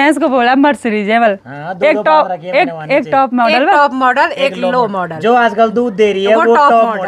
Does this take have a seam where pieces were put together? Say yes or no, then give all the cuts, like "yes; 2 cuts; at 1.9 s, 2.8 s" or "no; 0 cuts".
no; 0 cuts